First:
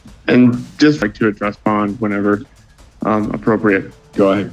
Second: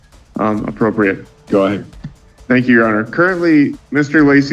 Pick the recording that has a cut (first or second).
first